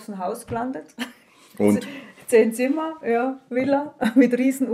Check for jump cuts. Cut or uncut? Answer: uncut